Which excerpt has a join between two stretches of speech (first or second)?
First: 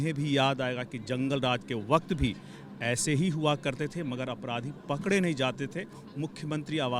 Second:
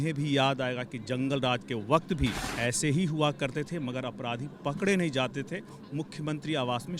second